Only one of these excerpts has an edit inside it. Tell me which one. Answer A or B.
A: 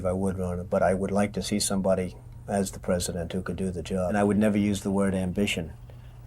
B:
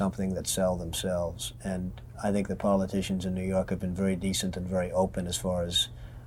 A